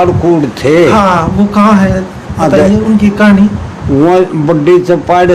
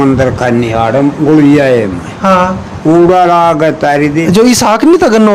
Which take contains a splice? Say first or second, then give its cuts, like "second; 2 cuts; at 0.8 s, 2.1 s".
second; 1 cut; at 4.2 s